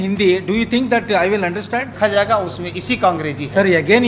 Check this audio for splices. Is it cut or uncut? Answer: cut